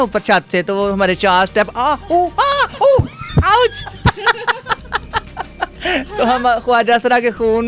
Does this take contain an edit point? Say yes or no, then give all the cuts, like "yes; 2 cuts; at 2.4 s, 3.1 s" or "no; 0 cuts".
no; 0 cuts